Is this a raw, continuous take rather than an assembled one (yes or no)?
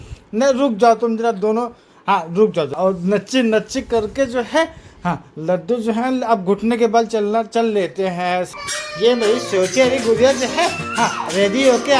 no